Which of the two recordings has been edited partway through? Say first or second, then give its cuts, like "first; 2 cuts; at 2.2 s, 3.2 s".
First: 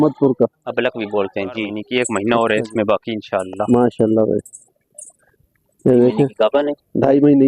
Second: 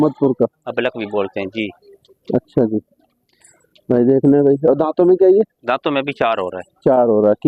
first; 2 cuts; at 1.8 s, 6.3 s